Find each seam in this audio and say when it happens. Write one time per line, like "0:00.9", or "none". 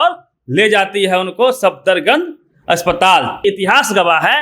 0:03.4